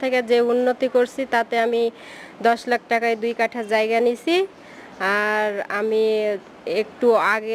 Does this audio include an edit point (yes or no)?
no